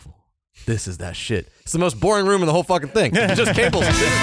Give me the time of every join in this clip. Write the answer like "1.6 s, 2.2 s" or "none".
none